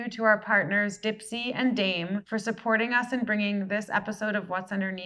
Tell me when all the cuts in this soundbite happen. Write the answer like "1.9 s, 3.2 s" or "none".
none